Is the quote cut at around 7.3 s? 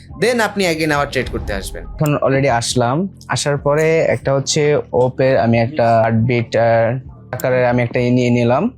yes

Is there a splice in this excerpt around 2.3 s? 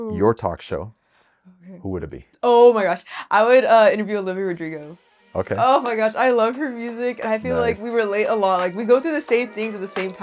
yes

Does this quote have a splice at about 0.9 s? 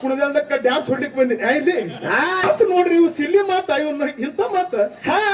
no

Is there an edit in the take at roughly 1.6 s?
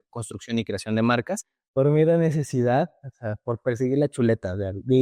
yes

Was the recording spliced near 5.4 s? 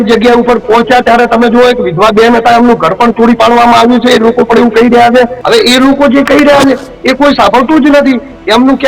yes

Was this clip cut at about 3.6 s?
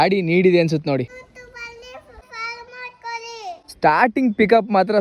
no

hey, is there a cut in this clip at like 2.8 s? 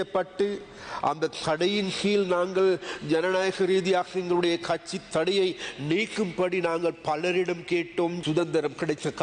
no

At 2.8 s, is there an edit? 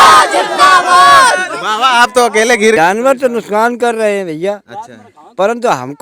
yes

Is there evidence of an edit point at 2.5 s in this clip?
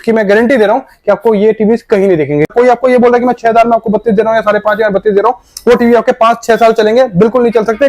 yes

